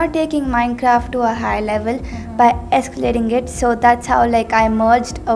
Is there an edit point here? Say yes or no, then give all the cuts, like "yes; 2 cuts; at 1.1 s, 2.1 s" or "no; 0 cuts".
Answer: no; 0 cuts